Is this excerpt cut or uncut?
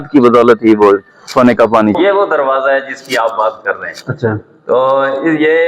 cut